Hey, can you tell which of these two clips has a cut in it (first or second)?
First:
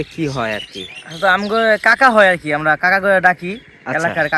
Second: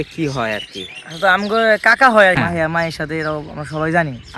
second